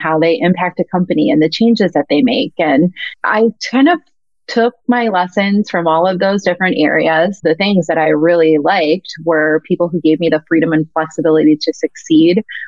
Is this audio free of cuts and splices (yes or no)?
no